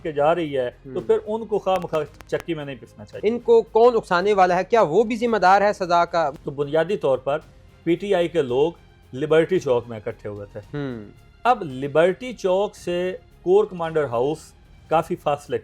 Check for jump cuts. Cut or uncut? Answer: cut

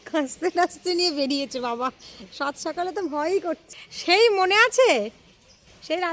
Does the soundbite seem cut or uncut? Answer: cut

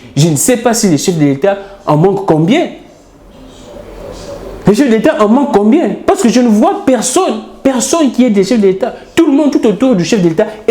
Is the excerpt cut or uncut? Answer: uncut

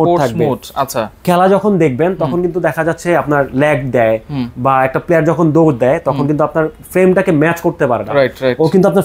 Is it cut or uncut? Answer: uncut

